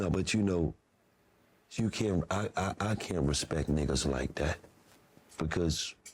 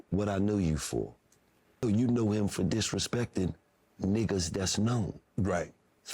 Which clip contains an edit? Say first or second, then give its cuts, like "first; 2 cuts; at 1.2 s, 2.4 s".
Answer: second; 1 cut; at 1.8 s